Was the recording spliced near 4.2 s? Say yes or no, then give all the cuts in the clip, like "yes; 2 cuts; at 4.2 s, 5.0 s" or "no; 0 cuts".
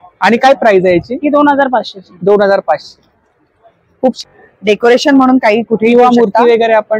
yes; 1 cut; at 4.2 s